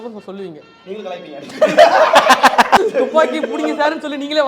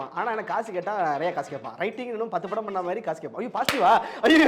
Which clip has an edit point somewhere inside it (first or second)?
first